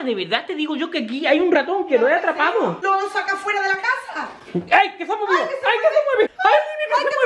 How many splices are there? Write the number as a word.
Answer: one